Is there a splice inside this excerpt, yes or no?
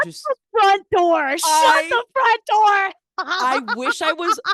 no